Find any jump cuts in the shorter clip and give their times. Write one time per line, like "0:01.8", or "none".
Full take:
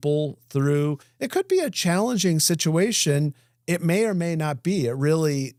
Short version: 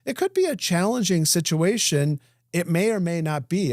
none